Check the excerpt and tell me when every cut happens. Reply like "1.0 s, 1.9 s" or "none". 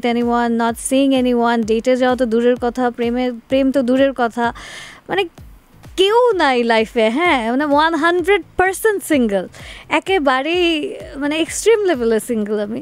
none